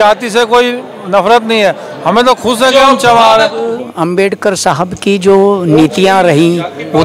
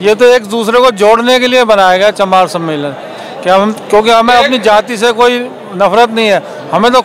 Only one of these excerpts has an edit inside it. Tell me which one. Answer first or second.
first